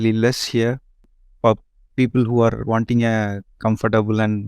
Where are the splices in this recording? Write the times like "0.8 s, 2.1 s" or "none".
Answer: 1.1 s